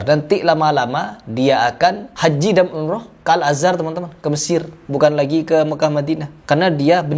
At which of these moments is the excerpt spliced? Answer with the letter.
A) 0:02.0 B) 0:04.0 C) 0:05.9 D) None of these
A